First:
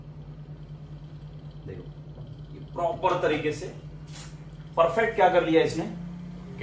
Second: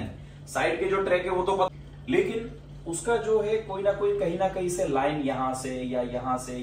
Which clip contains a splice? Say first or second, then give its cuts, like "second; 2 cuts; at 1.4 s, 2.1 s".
second; 1 cut; at 1.7 s